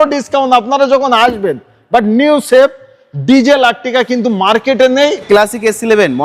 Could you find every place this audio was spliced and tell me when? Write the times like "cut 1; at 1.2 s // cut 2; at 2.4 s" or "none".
cut 1; at 5.2 s